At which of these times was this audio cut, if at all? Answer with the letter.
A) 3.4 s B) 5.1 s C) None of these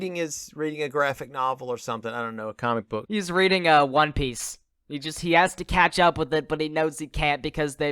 A